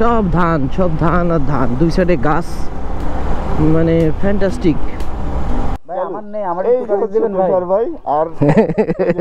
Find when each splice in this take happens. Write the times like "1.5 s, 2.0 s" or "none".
5.8 s